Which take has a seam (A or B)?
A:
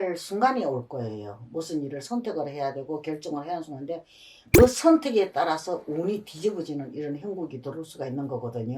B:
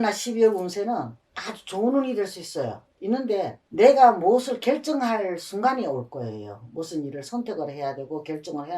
B